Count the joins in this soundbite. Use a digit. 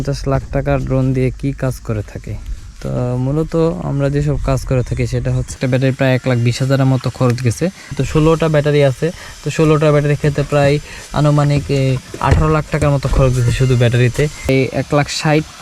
3